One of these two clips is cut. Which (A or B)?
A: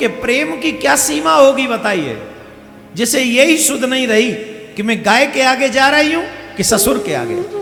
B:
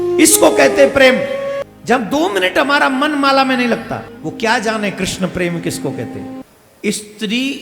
B